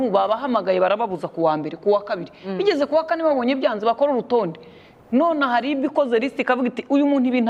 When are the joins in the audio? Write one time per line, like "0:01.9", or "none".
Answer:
none